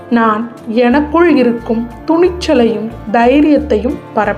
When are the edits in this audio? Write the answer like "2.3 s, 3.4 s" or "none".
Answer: none